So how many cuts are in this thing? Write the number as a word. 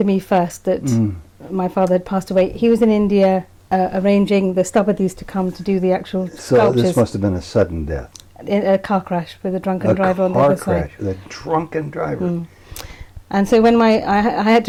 zero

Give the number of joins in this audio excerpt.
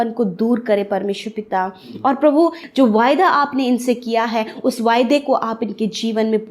one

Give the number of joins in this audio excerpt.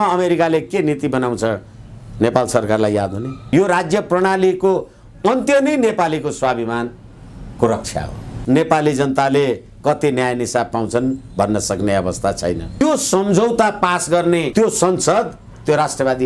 three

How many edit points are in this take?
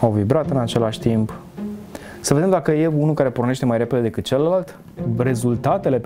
one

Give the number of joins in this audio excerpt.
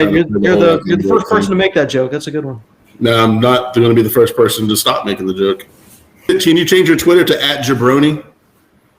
one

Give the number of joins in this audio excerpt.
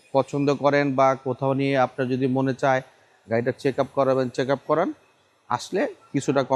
zero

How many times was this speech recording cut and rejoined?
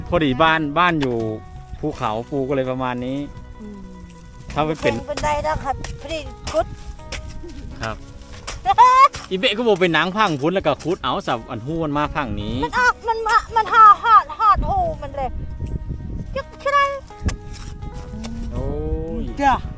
two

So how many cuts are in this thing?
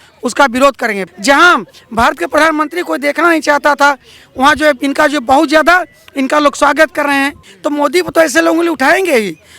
two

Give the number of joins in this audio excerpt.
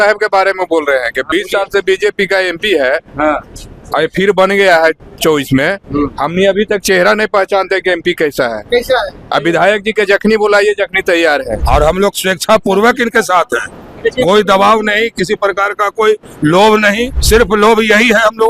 two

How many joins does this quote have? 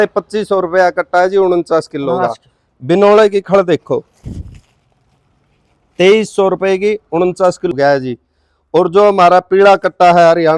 one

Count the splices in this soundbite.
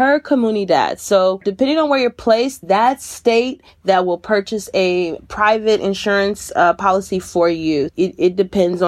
one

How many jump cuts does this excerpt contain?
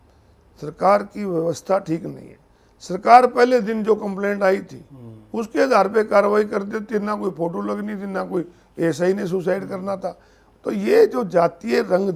zero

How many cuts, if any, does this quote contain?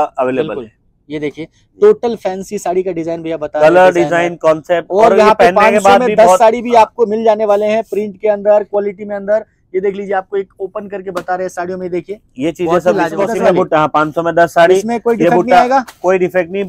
one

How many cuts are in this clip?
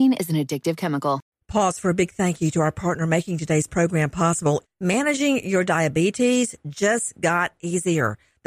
one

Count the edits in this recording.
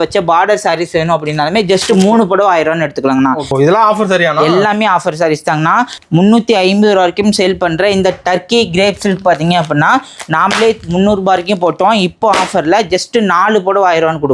two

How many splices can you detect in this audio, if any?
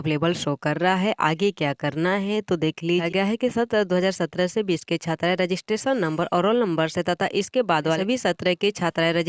two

